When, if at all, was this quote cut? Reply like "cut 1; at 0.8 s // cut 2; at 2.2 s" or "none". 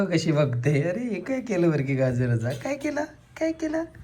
none